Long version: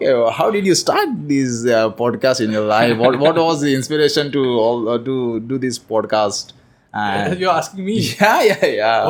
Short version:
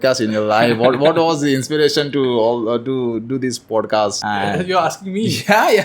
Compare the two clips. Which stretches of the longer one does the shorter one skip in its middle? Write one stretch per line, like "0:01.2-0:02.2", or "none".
0:06.4-0:06.9